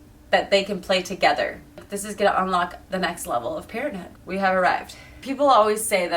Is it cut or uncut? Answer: cut